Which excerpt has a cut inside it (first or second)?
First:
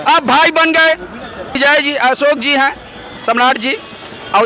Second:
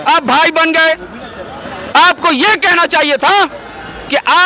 first